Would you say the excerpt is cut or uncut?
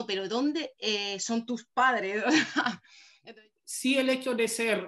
cut